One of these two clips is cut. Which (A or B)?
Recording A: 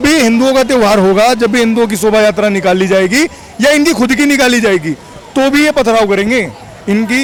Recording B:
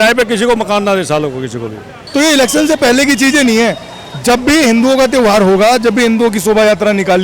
B